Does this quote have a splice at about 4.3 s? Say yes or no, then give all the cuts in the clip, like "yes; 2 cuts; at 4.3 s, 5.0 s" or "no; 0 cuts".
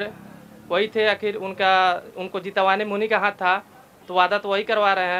no; 0 cuts